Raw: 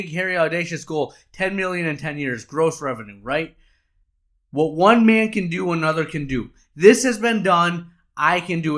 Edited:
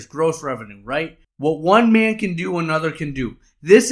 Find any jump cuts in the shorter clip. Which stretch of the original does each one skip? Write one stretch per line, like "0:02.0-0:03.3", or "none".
0:03.6-0:04.4